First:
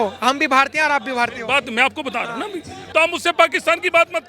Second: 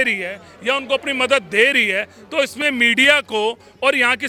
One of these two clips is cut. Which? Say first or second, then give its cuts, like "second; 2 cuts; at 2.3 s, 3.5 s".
first; 1 cut; at 2.8 s